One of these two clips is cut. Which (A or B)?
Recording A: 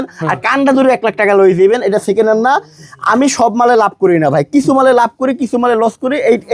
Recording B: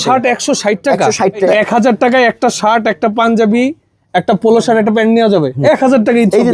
B